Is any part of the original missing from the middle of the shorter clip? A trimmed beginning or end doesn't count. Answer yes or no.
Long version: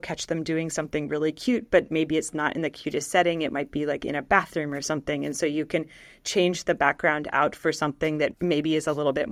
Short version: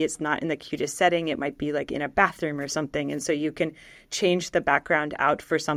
no